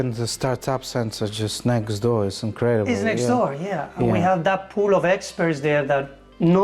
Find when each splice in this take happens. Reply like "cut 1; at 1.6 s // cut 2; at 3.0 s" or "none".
none